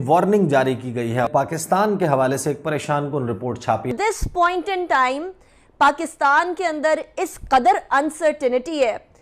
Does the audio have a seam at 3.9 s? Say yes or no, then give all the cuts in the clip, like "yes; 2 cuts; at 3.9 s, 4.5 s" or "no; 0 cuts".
yes; 2 cuts; at 1.3 s, 3.9 s